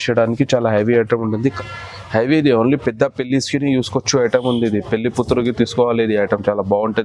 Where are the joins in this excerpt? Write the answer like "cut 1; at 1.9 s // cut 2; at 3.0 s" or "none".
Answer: cut 1; at 1.6 s